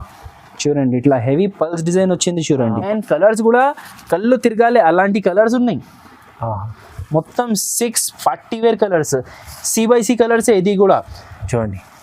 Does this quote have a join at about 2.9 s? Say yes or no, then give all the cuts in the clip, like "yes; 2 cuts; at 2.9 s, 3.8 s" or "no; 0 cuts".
yes; 1 cut; at 2.9 s